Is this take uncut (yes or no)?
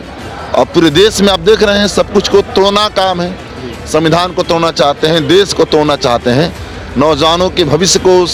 yes